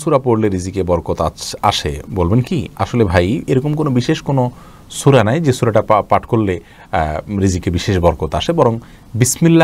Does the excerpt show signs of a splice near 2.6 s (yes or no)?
no